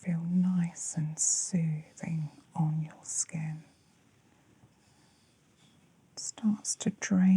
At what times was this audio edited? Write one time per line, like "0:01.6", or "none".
0:05.6